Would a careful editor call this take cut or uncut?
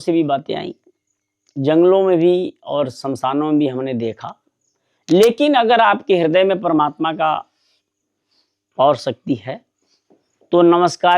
uncut